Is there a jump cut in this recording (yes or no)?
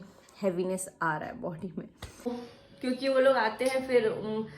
yes